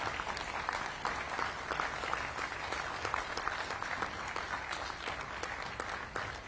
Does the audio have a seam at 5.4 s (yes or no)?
no